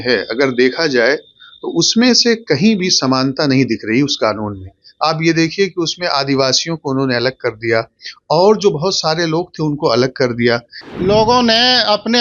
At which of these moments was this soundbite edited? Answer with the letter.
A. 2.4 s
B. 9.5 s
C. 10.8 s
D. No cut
C